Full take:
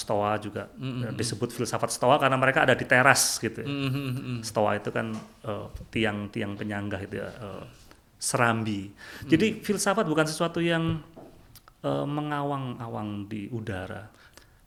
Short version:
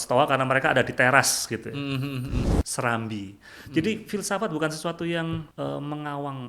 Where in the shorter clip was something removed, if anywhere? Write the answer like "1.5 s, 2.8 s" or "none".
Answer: 2.5 s, 5.5 s